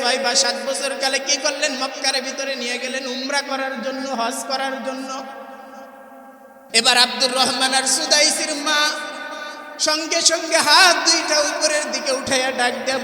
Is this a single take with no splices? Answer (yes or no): no